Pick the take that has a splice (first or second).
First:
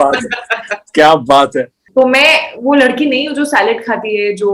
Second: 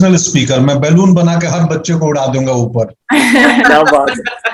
first